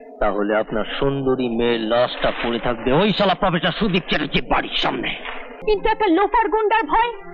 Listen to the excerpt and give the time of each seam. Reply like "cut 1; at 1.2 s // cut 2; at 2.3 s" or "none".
cut 1; at 5.6 s